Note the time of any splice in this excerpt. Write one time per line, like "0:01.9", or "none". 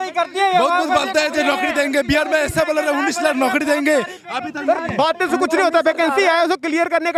none